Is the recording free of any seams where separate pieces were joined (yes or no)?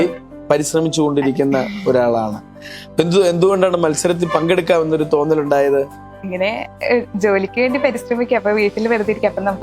yes